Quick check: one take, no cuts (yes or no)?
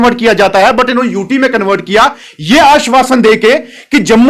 yes